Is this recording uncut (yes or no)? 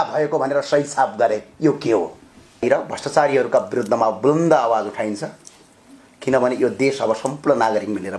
no